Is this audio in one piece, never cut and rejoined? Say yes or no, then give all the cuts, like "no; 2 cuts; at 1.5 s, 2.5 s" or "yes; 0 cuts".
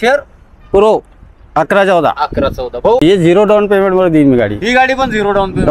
no; 1 cut; at 3.0 s